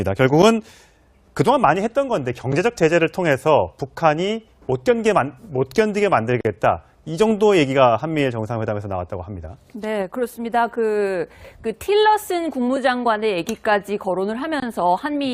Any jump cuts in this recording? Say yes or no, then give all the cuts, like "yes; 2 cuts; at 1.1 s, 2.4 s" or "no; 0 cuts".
yes; 1 cut; at 11.5 s